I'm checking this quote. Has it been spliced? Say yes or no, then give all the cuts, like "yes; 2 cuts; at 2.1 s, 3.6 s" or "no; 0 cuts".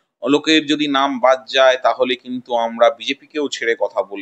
no; 0 cuts